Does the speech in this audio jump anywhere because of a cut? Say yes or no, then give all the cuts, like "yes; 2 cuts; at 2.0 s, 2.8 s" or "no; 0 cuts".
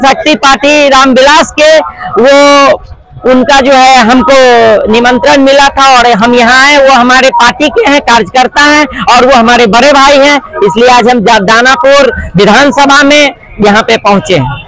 no; 0 cuts